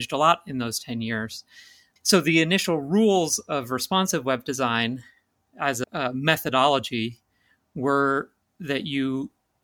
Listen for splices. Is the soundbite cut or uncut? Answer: cut